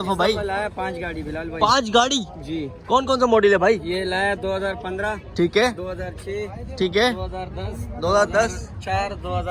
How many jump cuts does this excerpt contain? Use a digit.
0